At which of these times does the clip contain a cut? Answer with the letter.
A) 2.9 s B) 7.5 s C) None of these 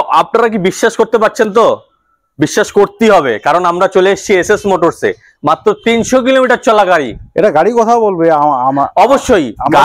C